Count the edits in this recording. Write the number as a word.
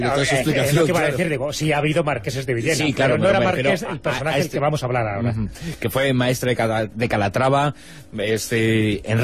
one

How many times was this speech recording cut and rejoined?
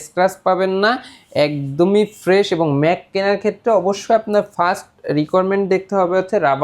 zero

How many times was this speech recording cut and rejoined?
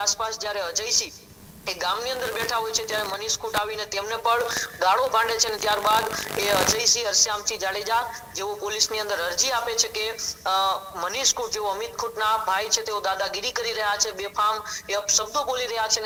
zero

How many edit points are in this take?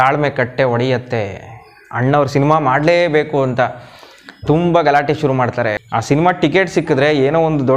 one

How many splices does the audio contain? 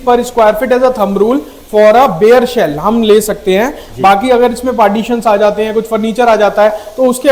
zero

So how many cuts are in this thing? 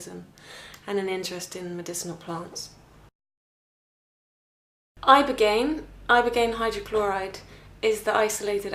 zero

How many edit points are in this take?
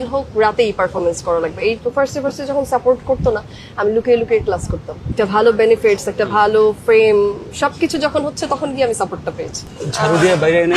three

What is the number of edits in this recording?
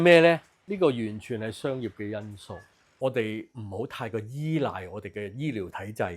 one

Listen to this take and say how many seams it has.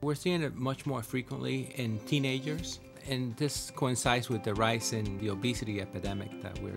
three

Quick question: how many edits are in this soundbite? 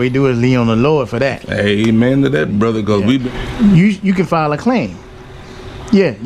one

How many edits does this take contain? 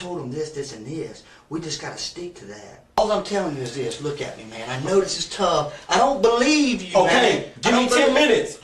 one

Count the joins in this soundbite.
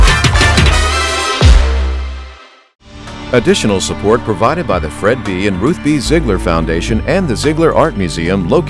one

